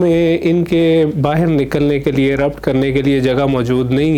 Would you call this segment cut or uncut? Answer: uncut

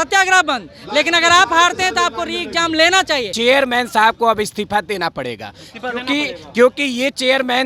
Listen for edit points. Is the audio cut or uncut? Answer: cut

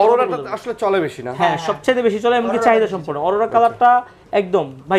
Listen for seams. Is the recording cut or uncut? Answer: uncut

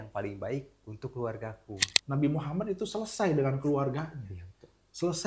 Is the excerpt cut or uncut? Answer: cut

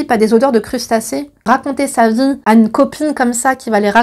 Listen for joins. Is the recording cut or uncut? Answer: cut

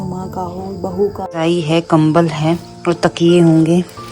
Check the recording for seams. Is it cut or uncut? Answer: cut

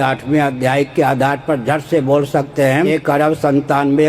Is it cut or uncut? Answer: cut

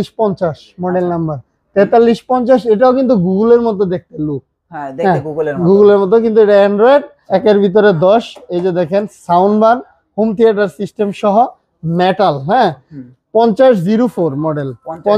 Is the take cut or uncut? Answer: cut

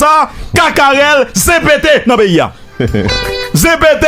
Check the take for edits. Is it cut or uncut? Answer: cut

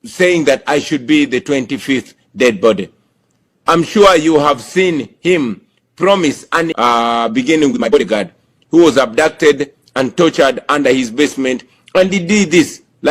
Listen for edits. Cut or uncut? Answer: cut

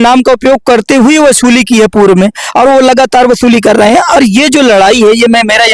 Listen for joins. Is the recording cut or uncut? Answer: uncut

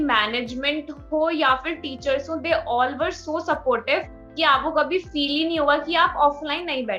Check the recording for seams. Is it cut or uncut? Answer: uncut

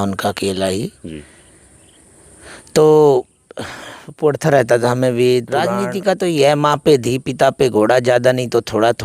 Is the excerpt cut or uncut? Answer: cut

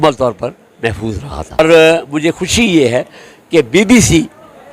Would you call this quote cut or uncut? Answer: cut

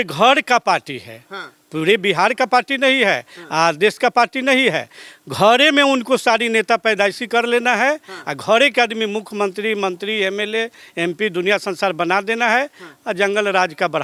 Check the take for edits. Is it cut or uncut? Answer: uncut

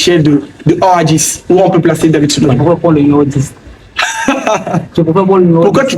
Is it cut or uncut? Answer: cut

